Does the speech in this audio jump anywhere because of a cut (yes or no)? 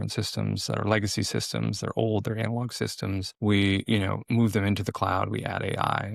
no